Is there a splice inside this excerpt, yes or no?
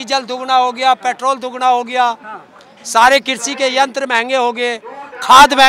no